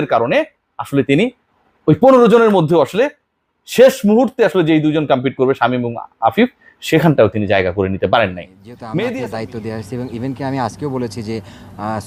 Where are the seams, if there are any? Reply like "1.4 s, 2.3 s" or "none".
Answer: 9.1 s